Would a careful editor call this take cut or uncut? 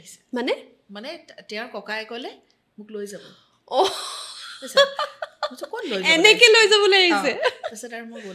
uncut